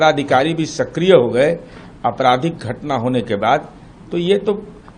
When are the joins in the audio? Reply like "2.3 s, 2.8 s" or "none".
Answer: none